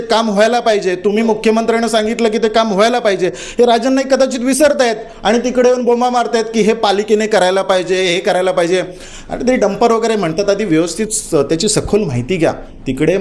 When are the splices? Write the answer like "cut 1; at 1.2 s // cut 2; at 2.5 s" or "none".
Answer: none